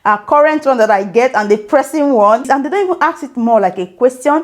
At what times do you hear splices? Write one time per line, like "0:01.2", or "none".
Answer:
0:02.4

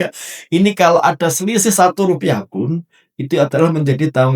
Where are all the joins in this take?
none

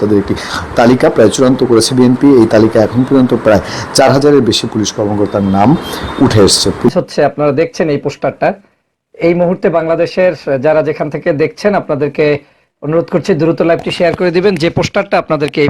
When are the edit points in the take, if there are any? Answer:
0:06.9

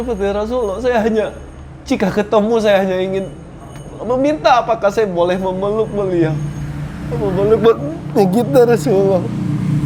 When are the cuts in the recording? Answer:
none

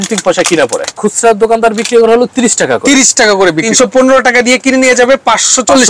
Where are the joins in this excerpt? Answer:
0:00.9
0:03.7

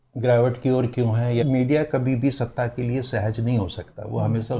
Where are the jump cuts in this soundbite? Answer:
0:01.4

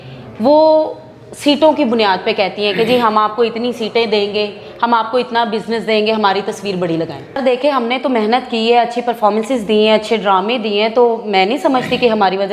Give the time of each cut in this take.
0:07.4

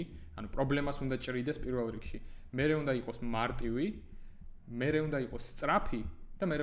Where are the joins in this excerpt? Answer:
none

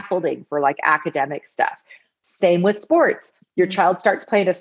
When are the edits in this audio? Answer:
none

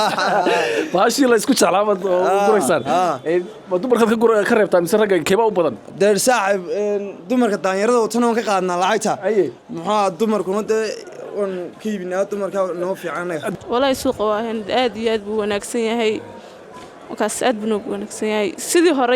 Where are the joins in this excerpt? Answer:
0:13.5

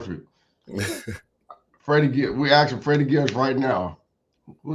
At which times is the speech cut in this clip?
none

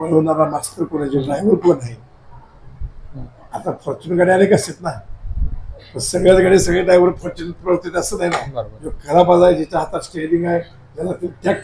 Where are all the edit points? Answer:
none

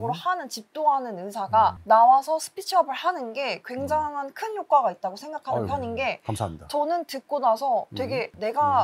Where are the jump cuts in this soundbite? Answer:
none

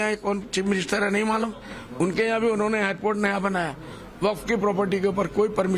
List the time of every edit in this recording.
none

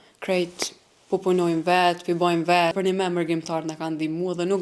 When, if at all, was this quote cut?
0:02.8

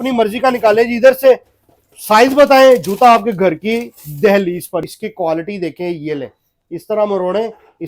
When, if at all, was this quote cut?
0:04.8

